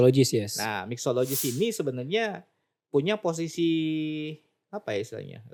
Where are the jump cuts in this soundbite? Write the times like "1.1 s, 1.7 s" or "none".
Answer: none